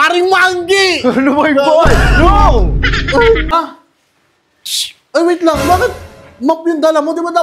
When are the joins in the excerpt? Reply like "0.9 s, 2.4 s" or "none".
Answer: 3.5 s